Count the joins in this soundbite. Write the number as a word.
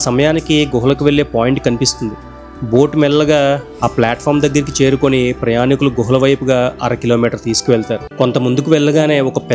one